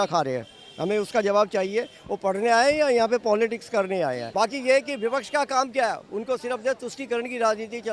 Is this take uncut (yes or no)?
no